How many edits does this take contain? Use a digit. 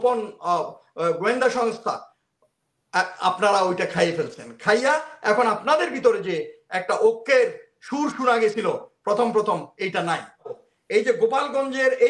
1